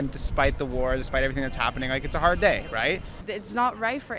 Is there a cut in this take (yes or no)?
yes